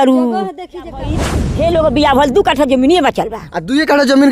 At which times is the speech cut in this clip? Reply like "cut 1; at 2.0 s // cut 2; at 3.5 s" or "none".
cut 1; at 1.4 s